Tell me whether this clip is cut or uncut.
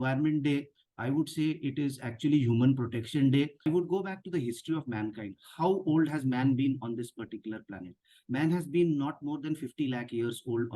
cut